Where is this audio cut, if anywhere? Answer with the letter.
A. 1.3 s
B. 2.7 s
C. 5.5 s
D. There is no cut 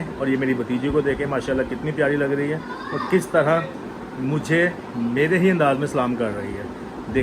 D